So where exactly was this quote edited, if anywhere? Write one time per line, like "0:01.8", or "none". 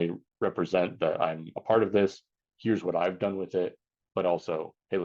none